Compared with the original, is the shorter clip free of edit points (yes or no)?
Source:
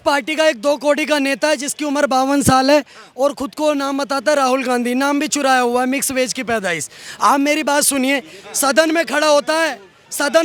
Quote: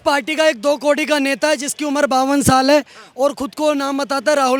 yes